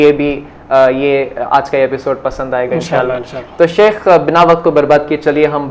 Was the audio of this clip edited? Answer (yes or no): no